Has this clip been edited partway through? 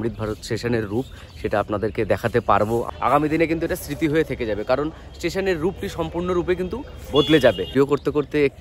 yes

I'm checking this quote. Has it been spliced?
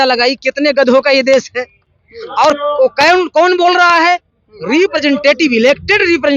no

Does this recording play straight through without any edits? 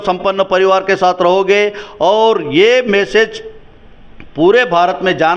yes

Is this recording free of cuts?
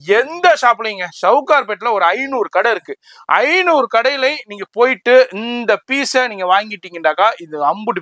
yes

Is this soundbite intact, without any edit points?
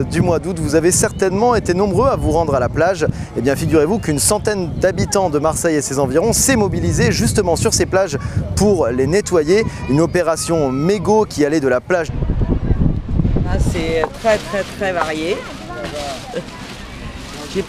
yes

